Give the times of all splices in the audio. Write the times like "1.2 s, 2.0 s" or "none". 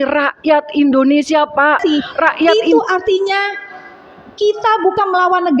2.6 s

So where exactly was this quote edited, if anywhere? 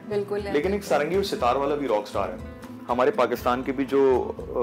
2.8 s

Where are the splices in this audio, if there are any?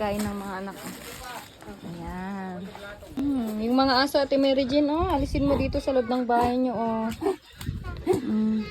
3.1 s

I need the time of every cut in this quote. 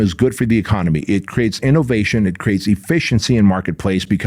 none

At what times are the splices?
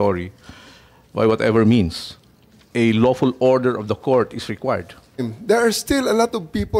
5.3 s

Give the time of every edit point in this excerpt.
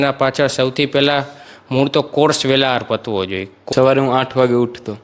3.6 s

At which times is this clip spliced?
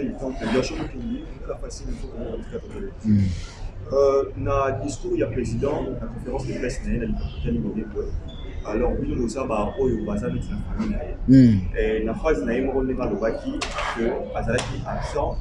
none

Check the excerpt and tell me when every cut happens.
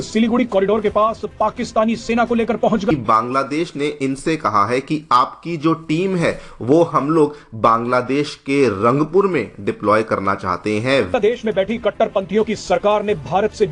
2.9 s, 11.1 s

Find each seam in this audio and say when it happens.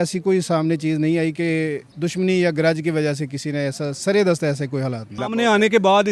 1.9 s, 5.2 s

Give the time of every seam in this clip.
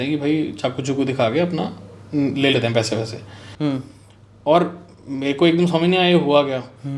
3.4 s

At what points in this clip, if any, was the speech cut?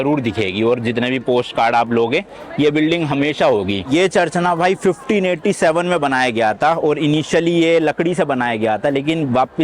none

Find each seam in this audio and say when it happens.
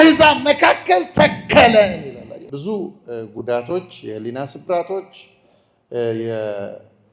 2.4 s

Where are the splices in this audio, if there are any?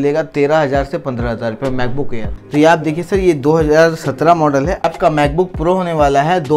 2.4 s, 4.9 s

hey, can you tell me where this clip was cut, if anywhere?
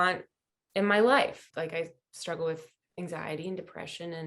1.3 s, 2.8 s

